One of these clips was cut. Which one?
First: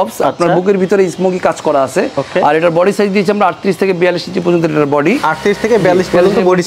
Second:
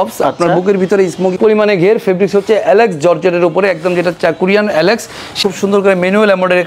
second; 2 cuts; at 1.4 s, 5.4 s

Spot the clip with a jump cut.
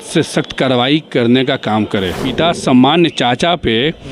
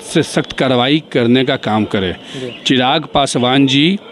first; 1 cut; at 2.2 s

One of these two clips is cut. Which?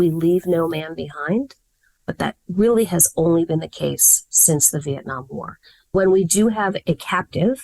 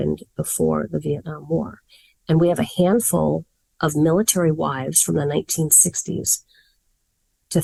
first; 2 cuts; at 5.9 s, 6.8 s

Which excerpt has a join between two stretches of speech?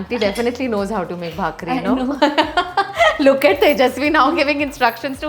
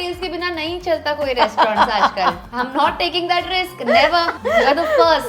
second; 2 cuts; at 2.4 s, 4.3 s

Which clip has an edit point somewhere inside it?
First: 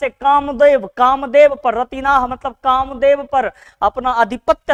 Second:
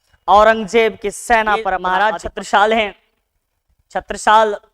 second; 1 cut; at 1.8 s

